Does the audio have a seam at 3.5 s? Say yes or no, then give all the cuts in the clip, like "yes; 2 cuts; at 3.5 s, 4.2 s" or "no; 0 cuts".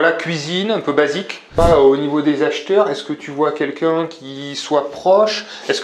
no; 1 cut; at 1.6 s